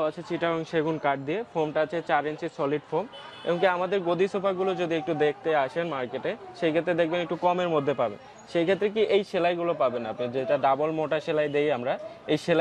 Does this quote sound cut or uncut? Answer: uncut